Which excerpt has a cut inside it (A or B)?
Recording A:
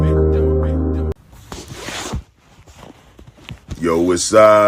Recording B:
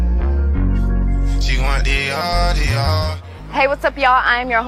A